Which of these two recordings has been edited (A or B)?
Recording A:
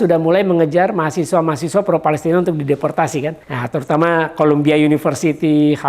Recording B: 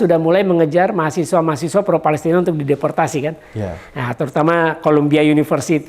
A